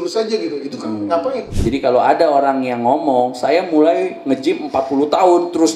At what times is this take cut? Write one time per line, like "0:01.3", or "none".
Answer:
0:01.5